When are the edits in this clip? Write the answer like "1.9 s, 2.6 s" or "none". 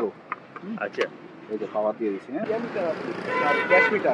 2.5 s